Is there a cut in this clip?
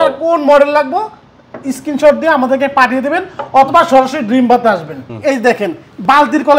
yes; 1 cut; at 5.0 s

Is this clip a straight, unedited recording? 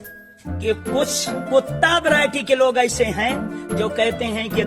no; 1 cut; at 1.3 s

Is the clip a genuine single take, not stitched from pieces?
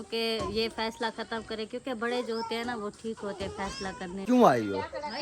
no; 1 cut; at 4.2 s

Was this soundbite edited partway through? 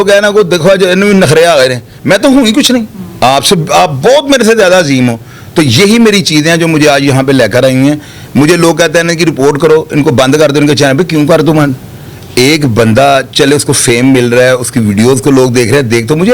no; 0 cuts

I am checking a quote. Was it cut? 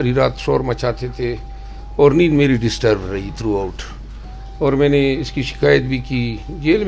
no; 0 cuts

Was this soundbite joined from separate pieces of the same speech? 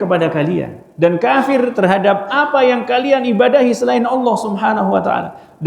no; 0 cuts

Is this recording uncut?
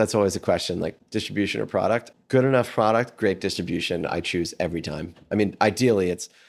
yes; 0 cuts

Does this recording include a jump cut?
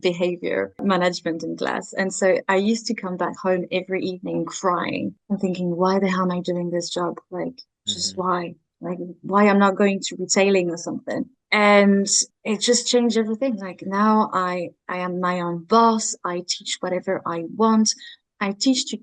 no; 0 cuts

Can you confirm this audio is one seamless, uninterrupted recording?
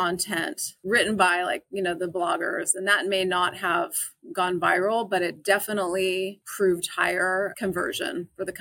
no; 2 cuts; at 6.4 s, 7.5 s

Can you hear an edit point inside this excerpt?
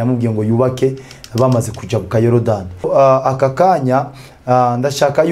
yes; 1 cut; at 2.9 s

